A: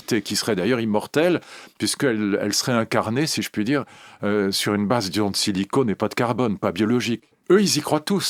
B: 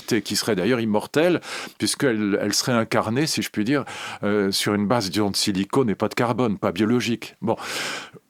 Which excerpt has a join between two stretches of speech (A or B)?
A